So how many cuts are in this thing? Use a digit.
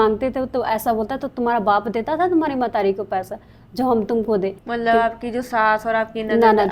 1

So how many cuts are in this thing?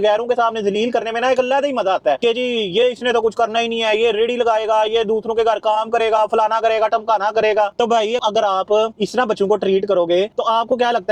0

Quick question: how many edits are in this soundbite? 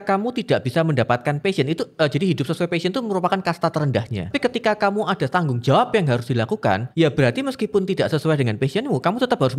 2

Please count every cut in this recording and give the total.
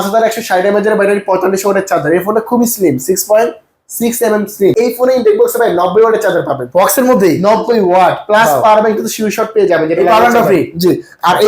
1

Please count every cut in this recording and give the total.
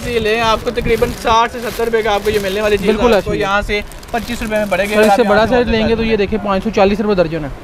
0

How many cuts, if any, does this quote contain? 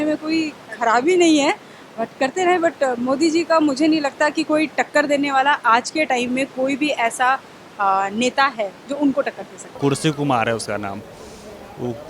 1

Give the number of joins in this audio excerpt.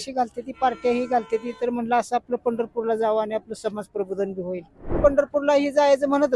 1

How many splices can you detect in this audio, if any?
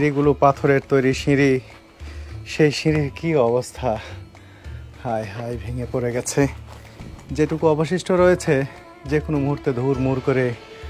0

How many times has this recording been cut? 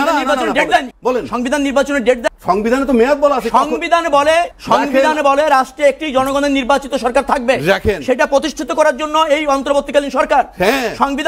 3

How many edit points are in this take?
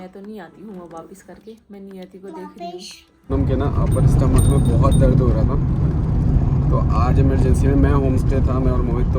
1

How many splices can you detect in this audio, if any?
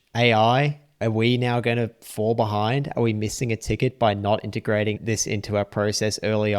1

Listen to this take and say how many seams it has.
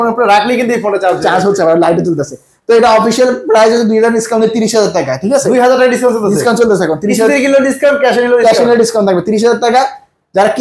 0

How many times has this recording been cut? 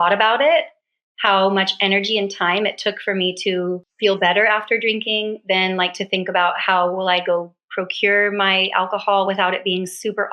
1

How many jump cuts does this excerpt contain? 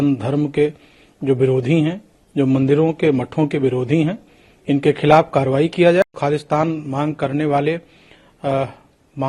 1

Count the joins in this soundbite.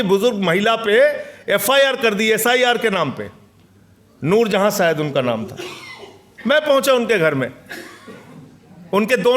0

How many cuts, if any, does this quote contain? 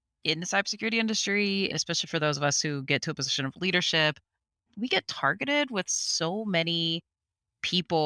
2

